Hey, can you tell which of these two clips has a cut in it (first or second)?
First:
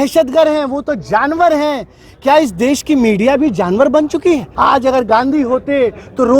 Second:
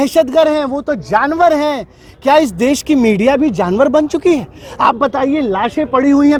first